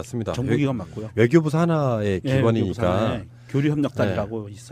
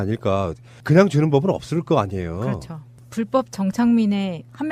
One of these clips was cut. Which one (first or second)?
first